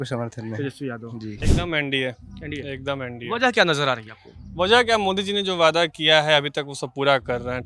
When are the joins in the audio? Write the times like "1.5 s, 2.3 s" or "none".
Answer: 1.5 s